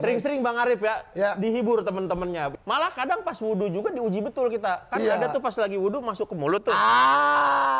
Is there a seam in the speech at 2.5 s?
yes; 1 cut; at 2.5 s

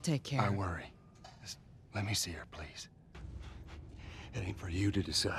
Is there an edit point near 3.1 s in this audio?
yes; 1 cut; at 3.1 s

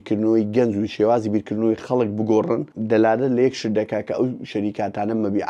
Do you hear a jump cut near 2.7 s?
yes; 1 cut; at 2.7 s

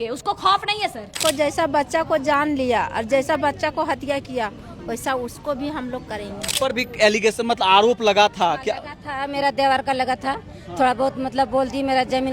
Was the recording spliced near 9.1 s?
no; 2 cuts; at 1.2 s, 6.5 s

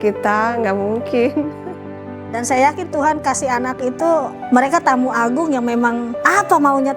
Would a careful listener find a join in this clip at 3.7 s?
no; 1 cut; at 2.1 s

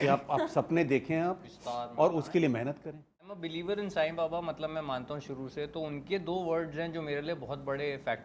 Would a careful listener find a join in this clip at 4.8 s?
no; 1 cut; at 3.4 s

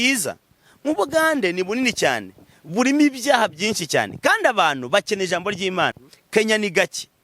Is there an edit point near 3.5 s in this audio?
no; 1 cut; at 6.0 s

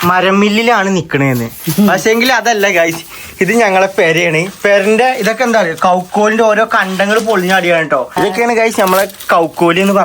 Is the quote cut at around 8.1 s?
yes; 1 cut; at 8.1 s

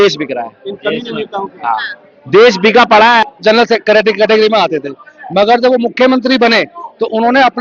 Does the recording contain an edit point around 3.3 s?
yes; 1 cut; at 3.3 s

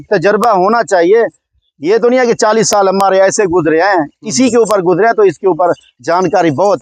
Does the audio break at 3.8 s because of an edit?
no; 0 cuts

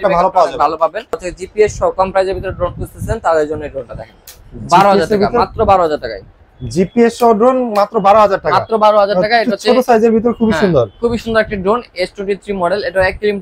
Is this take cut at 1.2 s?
yes; 1 cut; at 1.2 s

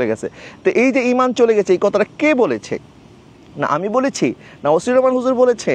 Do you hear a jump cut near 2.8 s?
no; 0 cuts

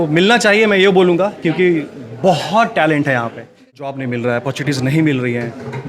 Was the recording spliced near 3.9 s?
yes; 1 cut; at 3.9 s

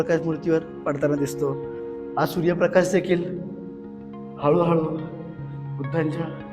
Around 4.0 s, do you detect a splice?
no; 1 cut; at 1.8 s

